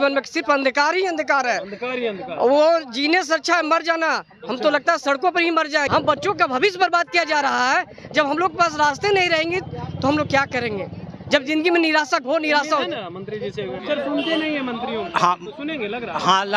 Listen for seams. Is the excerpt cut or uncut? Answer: cut